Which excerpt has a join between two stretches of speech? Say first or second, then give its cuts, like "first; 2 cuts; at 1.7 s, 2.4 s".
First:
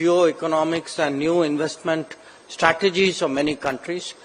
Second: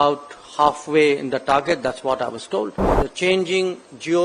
second; 1 cut; at 3.0 s